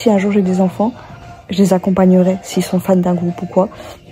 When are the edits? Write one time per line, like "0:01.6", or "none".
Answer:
none